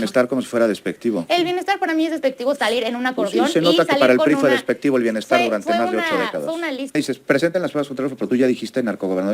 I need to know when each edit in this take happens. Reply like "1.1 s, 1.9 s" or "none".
6.9 s